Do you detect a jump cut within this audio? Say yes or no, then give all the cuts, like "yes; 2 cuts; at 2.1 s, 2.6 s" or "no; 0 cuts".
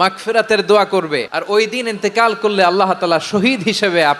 yes; 1 cut; at 1.3 s